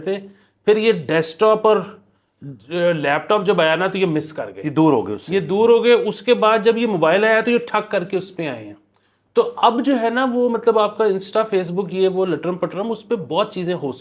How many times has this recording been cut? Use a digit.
0